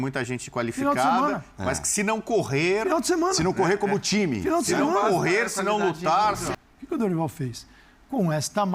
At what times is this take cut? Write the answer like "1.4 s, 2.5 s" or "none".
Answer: 6.5 s